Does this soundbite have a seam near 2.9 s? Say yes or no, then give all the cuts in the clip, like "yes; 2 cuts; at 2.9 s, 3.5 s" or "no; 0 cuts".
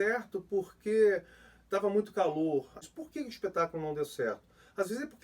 yes; 1 cut; at 2.9 s